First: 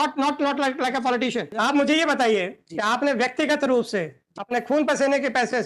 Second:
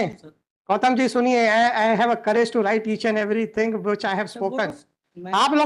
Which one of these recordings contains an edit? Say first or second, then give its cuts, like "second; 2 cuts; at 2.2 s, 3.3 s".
first; 1 cut; at 1.5 s